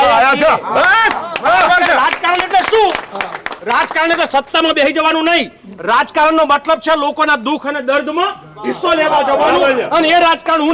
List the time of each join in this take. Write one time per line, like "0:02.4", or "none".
none